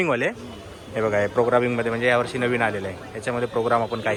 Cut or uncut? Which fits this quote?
uncut